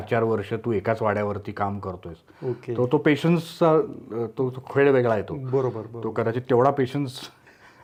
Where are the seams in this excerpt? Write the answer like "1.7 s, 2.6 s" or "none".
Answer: none